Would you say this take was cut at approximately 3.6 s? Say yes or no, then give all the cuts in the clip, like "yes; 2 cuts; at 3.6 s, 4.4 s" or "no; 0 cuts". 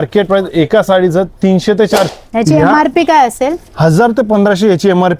no; 1 cut; at 2.2 s